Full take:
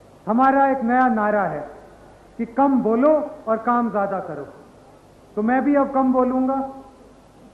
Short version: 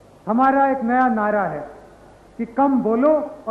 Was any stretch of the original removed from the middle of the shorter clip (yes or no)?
no